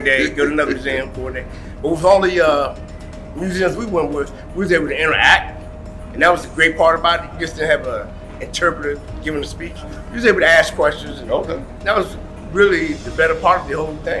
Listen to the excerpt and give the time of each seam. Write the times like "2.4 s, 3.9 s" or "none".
none

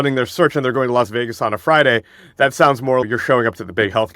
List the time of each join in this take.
3.0 s

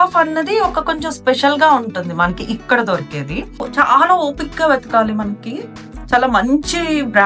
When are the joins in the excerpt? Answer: 3.7 s

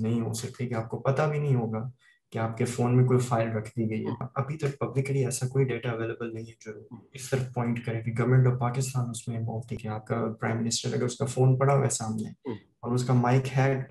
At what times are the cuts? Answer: 4.2 s, 9.8 s

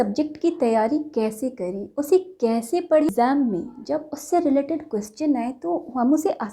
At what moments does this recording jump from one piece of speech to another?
3.1 s

